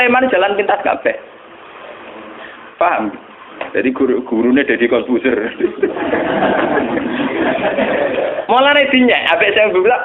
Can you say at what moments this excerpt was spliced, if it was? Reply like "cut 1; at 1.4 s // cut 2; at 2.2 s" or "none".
none